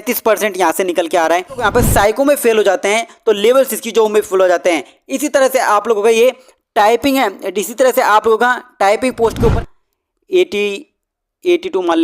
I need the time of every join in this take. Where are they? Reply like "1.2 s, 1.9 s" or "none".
1.6 s, 9.5 s